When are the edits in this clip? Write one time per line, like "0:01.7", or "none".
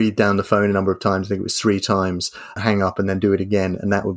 0:02.6

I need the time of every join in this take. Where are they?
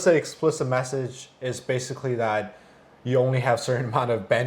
none

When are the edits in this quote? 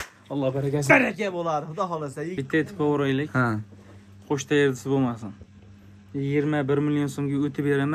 0:02.3

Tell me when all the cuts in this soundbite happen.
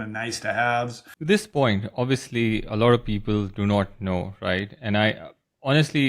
0:01.1

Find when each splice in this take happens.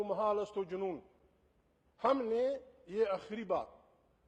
none

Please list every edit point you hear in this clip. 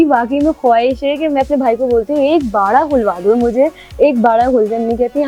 none

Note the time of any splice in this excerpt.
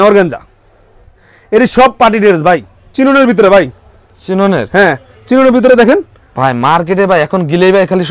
0:02.6

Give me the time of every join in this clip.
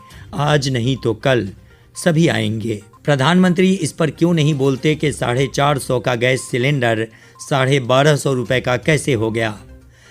0:02.9

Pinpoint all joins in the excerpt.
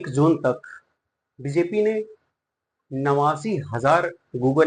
none

